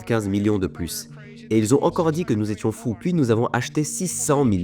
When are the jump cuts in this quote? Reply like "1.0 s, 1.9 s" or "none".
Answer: 2.9 s